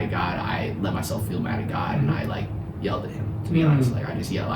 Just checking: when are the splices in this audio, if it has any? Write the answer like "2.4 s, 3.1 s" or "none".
none